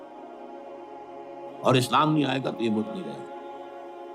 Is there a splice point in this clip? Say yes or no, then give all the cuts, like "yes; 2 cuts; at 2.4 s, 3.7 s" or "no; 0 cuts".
yes; 1 cut; at 1.1 s